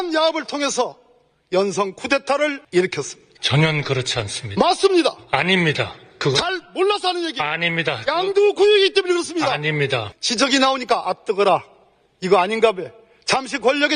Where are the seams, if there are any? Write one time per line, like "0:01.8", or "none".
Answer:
0:02.6
0:10.1